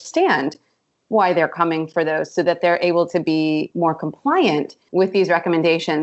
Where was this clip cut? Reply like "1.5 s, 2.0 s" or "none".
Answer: 3.7 s, 4.8 s